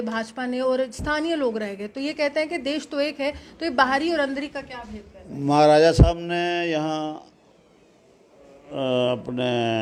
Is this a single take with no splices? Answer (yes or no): yes